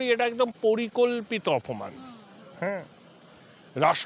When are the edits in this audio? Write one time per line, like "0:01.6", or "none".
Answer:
none